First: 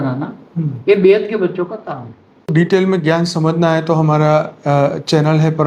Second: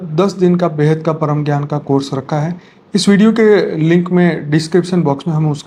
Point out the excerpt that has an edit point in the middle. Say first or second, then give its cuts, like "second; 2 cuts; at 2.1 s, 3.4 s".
first; 1 cut; at 2.5 s